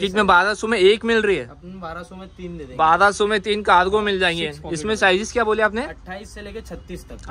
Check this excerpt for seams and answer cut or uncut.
uncut